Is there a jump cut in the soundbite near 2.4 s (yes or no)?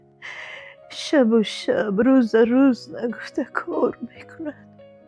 no